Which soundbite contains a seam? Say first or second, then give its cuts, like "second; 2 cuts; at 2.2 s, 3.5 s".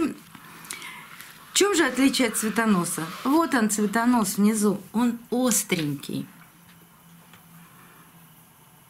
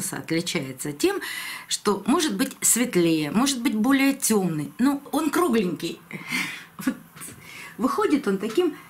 second; 1 cut; at 5.0 s